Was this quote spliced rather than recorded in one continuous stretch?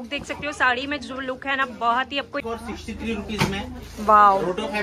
yes; 1 cut; at 2.4 s

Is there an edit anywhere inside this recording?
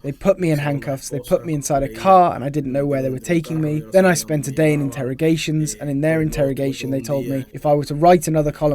yes; 2 cuts; at 3.8 s, 7.5 s

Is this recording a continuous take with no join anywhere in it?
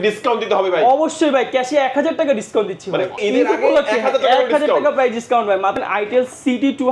no; 2 cuts; at 3.2 s, 5.8 s

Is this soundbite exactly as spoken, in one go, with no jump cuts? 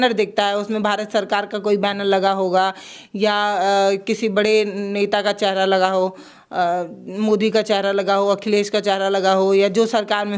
yes; 0 cuts

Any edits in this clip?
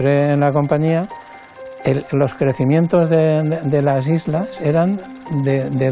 no; 0 cuts

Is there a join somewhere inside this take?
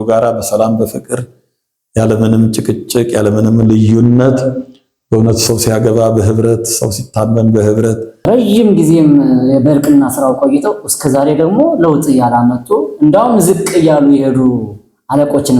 yes; 1 cut; at 8.3 s

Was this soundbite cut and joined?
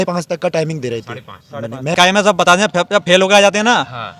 yes; 1 cut; at 1.9 s

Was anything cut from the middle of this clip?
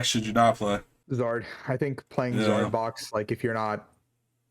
yes; 1 cut; at 0.9 s

